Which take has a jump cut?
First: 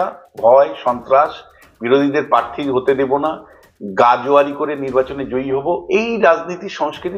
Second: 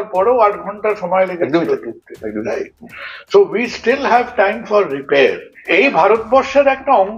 second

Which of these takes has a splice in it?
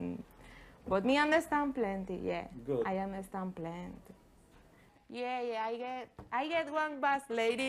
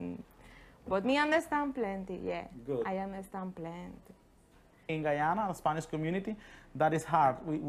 second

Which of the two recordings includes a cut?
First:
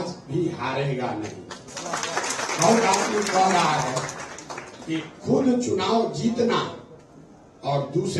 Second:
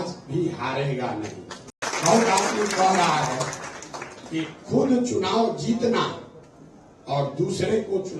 second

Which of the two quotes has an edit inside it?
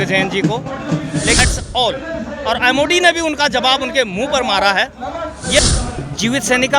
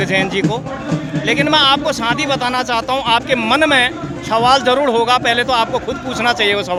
first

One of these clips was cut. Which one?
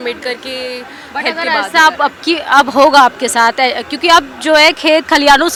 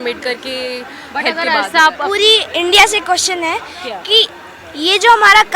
second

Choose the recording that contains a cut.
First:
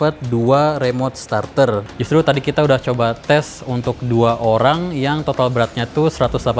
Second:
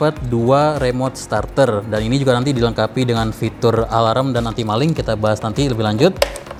first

